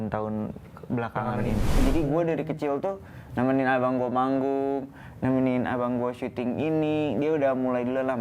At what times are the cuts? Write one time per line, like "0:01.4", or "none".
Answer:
0:01.8